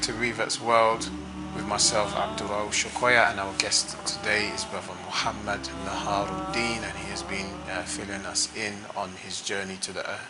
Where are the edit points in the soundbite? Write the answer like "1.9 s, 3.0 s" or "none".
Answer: none